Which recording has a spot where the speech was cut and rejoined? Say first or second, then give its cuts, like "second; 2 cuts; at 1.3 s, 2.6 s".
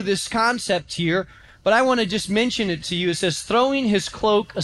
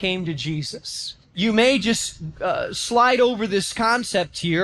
second; 1 cut; at 1.2 s